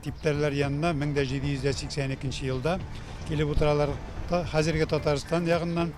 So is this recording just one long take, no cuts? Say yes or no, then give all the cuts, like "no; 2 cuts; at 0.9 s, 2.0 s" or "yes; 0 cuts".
yes; 0 cuts